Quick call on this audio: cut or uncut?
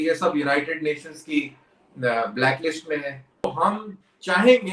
cut